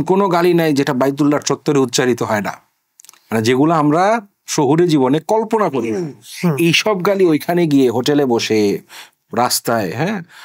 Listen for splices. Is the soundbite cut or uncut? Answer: uncut